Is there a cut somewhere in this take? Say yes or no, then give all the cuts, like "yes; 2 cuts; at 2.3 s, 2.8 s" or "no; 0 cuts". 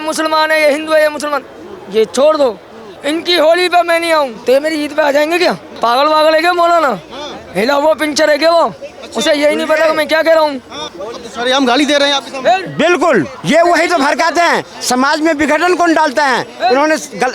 yes; 4 cuts; at 2.8 s, 4.4 s, 5.7 s, 13.4 s